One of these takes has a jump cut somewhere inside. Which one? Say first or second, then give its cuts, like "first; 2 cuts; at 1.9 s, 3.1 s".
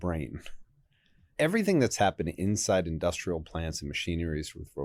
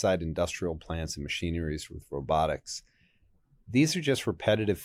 first; 1 cut; at 1.3 s